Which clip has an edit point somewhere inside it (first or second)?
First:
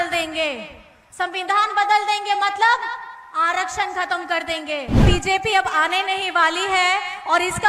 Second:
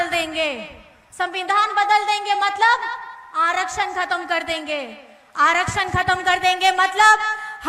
first